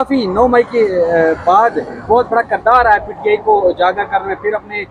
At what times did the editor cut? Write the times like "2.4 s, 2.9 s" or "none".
none